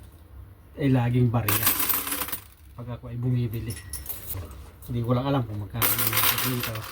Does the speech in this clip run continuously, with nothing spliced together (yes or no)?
no